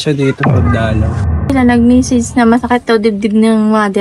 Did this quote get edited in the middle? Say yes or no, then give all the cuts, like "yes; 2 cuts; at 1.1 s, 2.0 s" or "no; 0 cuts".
yes; 1 cut; at 1.3 s